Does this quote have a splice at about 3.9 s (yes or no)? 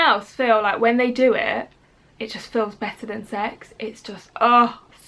no